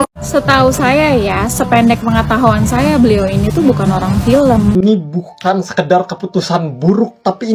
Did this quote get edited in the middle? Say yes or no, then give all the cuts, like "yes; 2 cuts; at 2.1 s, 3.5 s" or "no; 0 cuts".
yes; 1 cut; at 4.7 s